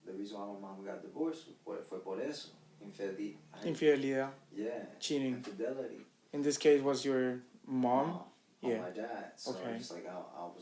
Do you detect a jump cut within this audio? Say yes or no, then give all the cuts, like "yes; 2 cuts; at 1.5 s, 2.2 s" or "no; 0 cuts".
no; 0 cuts